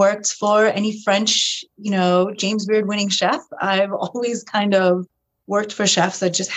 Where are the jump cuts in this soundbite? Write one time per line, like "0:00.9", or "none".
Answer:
none